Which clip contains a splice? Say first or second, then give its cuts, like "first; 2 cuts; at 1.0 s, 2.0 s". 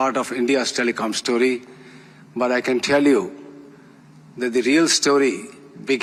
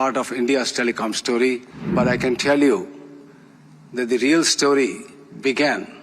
second; 1 cut; at 1.8 s